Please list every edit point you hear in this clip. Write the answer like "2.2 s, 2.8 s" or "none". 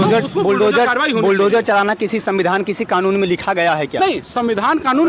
none